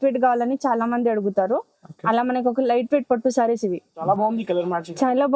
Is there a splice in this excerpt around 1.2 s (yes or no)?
no